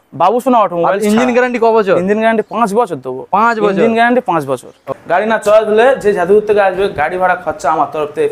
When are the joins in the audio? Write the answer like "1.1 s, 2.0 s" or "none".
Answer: 4.9 s